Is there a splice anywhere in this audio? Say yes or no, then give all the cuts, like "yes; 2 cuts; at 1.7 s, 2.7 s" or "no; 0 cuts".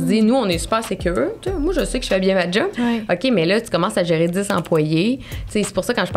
no; 0 cuts